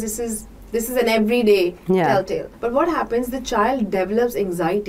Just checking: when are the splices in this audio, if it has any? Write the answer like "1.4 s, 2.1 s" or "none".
2.5 s